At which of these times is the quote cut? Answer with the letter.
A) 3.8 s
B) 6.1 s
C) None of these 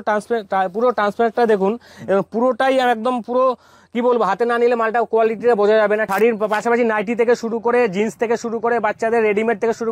B